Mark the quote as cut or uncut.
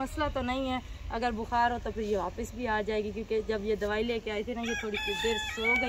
uncut